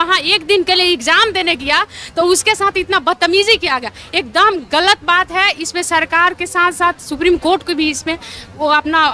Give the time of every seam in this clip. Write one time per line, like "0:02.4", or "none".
none